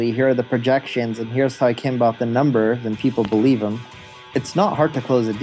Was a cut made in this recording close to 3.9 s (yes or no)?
yes